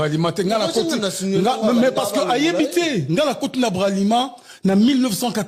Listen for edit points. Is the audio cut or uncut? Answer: uncut